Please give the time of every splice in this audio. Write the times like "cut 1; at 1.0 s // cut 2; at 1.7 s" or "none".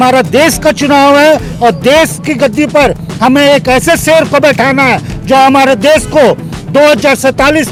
none

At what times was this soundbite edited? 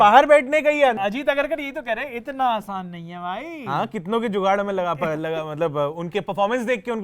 cut 1; at 1.0 s

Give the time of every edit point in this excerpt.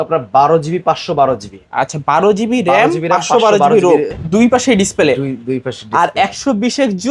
cut 1; at 4.1 s

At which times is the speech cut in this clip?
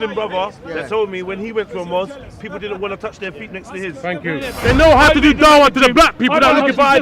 cut 1; at 4.5 s

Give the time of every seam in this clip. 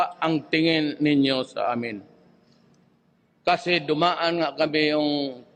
none

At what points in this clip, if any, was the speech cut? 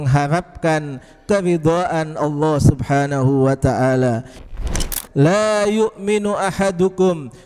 cut 1; at 4.6 s

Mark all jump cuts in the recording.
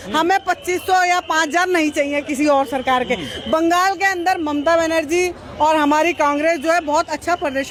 none

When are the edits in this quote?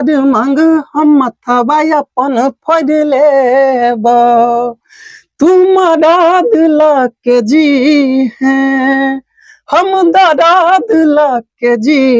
none

